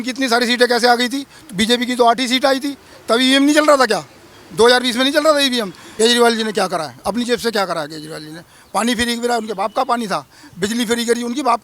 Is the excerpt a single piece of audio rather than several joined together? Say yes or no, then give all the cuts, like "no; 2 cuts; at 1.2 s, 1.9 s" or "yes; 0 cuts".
no; 1 cut; at 5.8 s